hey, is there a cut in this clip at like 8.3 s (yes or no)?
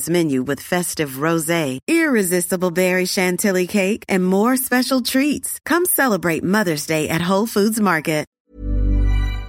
yes